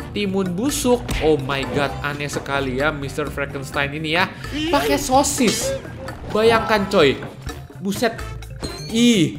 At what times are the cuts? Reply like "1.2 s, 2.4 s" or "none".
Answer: none